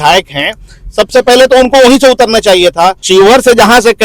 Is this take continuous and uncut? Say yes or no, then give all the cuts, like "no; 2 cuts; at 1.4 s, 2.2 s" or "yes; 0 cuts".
no; 1 cut; at 3.0 s